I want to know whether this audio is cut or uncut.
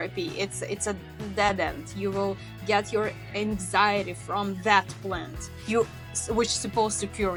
uncut